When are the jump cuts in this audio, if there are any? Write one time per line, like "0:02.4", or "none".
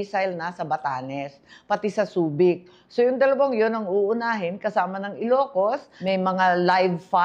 0:05.9